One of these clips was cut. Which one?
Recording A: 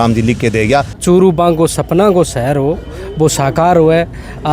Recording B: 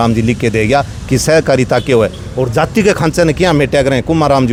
A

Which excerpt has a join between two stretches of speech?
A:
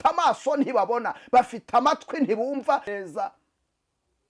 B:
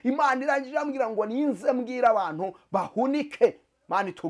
A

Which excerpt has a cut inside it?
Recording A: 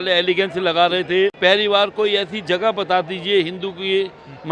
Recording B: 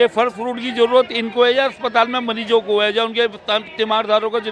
A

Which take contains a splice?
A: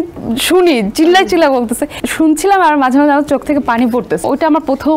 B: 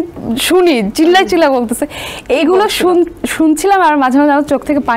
A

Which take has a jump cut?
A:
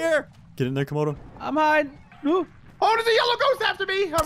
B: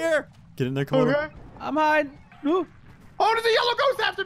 A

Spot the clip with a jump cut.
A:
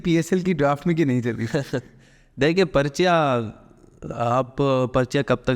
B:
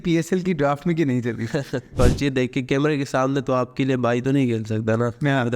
B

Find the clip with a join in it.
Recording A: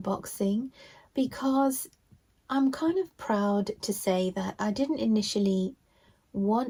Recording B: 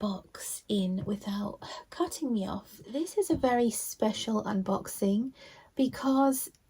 B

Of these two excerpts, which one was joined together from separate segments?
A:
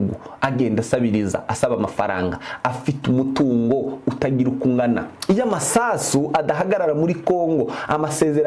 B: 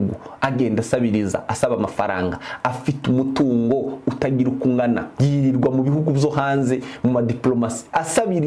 A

